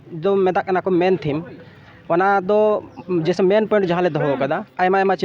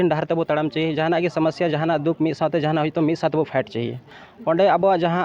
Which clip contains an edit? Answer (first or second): second